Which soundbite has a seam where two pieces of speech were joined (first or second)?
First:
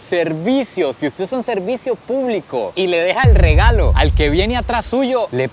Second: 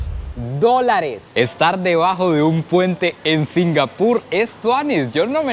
second